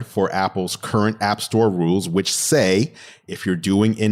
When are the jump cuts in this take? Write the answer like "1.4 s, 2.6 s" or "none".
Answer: none